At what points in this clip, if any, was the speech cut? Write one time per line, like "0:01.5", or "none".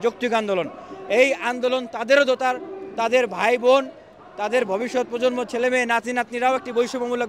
none